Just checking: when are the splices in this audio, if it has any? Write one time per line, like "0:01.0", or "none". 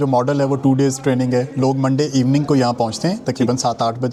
none